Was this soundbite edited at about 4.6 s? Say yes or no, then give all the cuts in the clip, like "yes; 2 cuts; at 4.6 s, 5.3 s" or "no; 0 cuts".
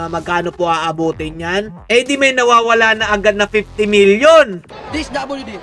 yes; 1 cut; at 4.6 s